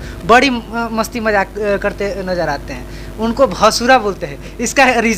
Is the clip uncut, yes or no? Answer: yes